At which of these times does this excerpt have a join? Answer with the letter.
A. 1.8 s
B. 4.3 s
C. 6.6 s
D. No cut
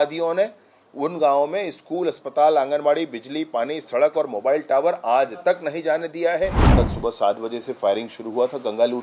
C